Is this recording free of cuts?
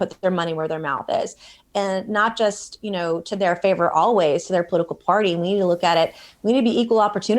yes; 0 cuts

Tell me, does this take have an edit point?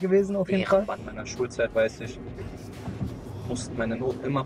yes; 1 cut; at 1.2 s

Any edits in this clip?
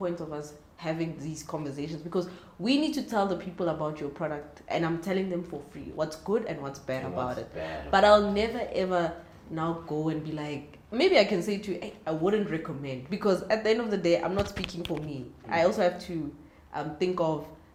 no; 0 cuts

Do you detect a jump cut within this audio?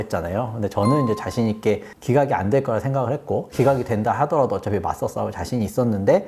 no; 0 cuts

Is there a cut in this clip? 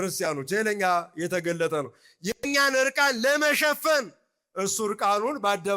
no; 0 cuts

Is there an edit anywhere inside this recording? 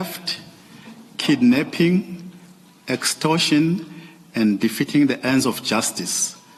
no; 0 cuts

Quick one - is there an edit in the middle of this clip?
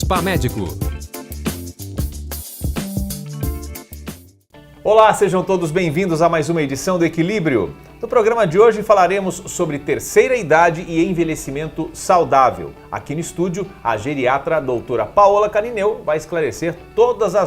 yes; 1 cut; at 4.3 s

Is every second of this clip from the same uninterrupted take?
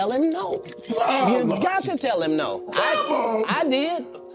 yes; 0 cuts

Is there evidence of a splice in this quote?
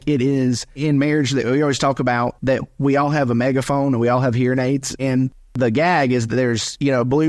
yes; 3 cuts; at 0.8 s, 2.4 s, 4.9 s

